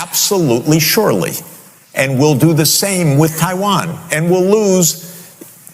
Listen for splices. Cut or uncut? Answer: uncut